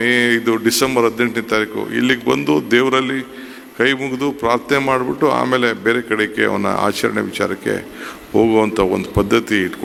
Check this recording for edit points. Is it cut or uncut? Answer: uncut